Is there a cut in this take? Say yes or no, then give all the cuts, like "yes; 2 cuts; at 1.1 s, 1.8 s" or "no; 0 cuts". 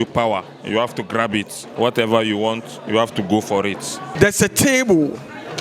yes; 1 cut; at 4.0 s